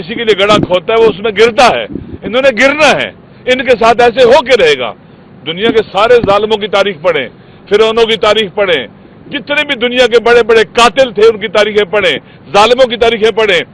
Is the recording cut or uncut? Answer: uncut